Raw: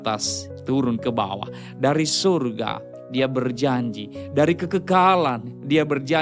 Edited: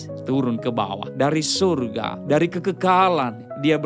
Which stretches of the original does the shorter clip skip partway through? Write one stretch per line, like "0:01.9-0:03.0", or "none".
0:01.4-0:01.7
0:02.8-0:04.2